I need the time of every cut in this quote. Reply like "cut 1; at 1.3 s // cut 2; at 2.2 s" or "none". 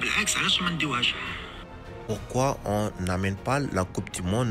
cut 1; at 2.0 s